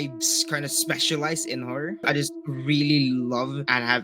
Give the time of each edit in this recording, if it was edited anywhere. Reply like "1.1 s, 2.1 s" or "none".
2.1 s